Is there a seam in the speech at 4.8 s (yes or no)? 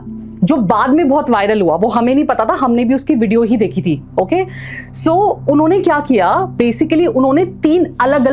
no